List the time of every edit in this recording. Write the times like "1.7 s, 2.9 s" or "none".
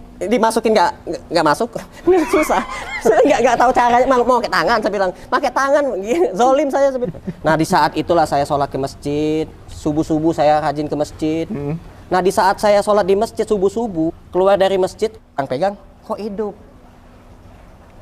7.1 s, 14.2 s, 15.3 s